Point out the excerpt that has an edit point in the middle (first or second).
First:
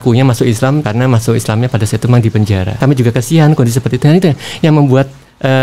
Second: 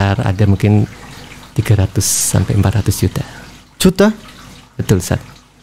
first